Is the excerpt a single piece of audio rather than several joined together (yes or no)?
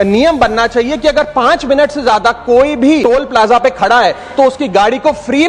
no